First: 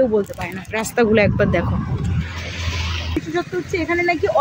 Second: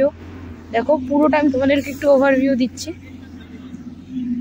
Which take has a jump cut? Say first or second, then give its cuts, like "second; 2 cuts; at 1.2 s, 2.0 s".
first; 1 cut; at 3.0 s